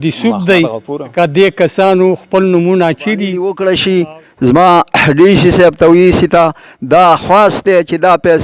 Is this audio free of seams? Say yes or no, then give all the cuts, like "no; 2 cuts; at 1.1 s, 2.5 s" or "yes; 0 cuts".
no; 2 cuts; at 1.1 s, 3.4 s